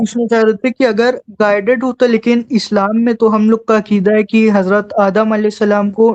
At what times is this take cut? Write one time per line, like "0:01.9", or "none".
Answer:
none